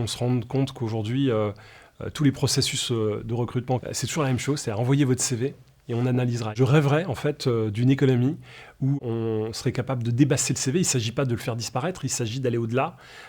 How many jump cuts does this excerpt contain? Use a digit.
2